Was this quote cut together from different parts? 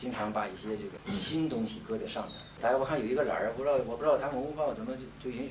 yes; 2 cuts; at 1.0 s, 2.5 s

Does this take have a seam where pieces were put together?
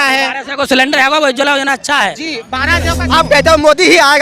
yes; 1 cut; at 3.0 s

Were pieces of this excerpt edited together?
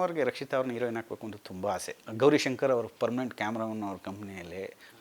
yes; 1 cut; at 2.1 s

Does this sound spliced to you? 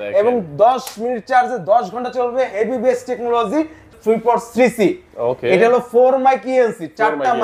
yes; 1 cut; at 3.9 s

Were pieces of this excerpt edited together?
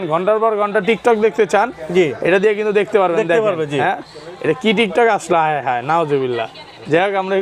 no; 0 cuts

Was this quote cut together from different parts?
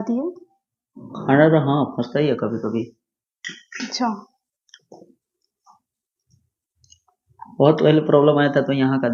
no; 0 cuts

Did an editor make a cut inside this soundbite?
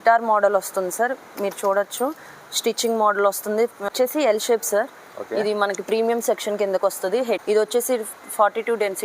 yes; 2 cuts; at 3.8 s, 7.4 s

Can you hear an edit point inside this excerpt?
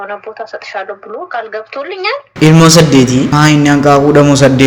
yes; 2 cuts; at 2.2 s, 3.3 s

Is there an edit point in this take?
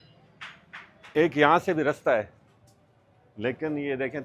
no; 0 cuts

